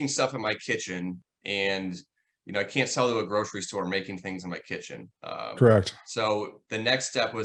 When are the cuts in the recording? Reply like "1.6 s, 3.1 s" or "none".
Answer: none